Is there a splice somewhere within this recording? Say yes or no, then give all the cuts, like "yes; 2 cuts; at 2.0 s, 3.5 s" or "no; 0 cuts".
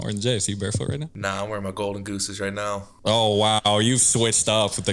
yes; 2 cuts; at 1.1 s, 2.9 s